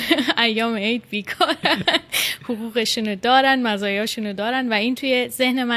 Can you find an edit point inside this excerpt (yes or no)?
no